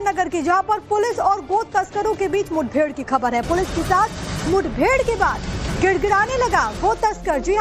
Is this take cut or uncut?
uncut